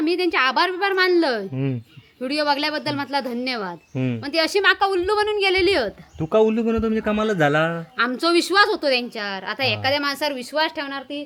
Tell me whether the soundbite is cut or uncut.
uncut